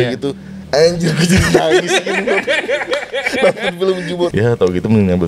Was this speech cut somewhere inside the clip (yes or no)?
yes